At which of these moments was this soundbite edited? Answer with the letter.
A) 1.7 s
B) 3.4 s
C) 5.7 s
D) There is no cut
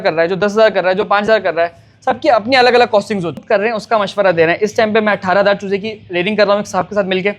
B